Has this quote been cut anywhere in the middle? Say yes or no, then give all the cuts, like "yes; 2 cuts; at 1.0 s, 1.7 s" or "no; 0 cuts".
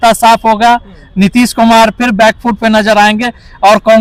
no; 0 cuts